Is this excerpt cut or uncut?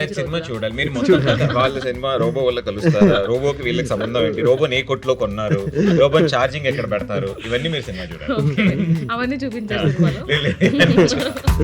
uncut